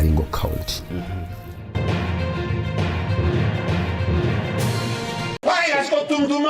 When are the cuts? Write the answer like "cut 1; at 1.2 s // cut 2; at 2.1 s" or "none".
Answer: cut 1; at 5.4 s